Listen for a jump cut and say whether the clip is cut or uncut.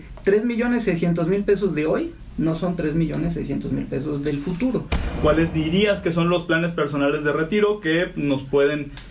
cut